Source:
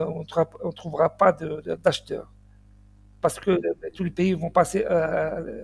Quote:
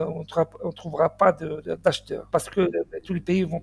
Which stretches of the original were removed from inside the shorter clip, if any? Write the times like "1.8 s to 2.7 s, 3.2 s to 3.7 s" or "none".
2.1 s to 3.0 s